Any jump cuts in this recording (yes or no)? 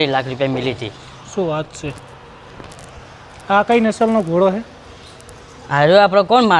no